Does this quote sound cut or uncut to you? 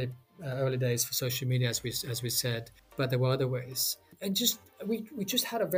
cut